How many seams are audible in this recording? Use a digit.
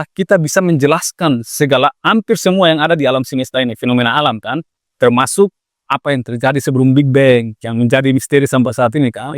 0